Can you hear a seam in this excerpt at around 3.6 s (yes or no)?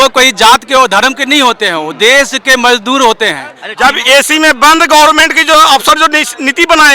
yes